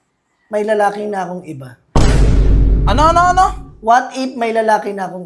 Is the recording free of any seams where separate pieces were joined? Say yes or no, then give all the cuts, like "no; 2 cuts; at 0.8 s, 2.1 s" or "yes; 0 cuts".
yes; 0 cuts